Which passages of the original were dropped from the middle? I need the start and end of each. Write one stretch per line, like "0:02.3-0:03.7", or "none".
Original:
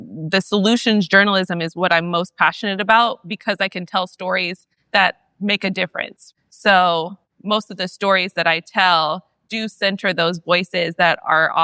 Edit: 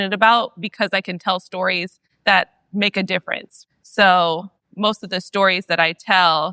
none